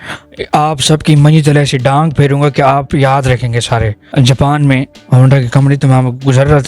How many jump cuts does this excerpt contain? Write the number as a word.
one